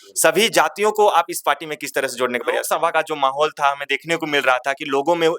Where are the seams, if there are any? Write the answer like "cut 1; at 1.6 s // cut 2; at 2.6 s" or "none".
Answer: cut 1; at 2.7 s